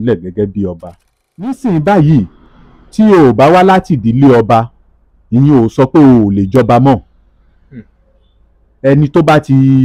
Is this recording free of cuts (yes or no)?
no